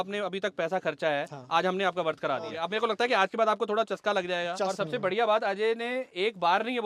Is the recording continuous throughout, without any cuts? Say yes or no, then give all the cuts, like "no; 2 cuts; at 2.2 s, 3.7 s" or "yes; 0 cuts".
no; 2 cuts; at 2.6 s, 4.6 s